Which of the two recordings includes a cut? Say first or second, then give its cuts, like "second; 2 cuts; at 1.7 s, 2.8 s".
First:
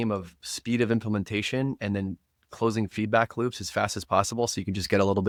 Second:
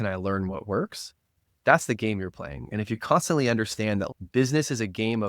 second; 1 cut; at 4.2 s